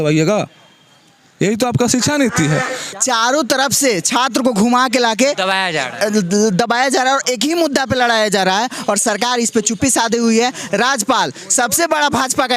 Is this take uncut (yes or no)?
no